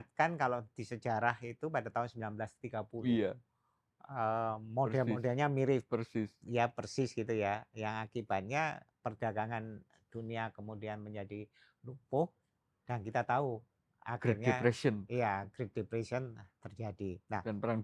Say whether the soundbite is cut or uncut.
uncut